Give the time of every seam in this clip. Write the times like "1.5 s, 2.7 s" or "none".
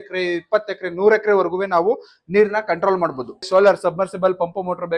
3.5 s